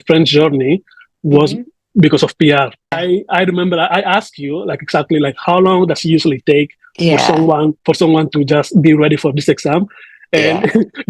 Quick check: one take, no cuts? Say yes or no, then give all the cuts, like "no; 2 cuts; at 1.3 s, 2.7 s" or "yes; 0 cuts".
no; 1 cut; at 3.0 s